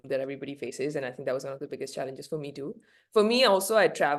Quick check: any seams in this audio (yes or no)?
no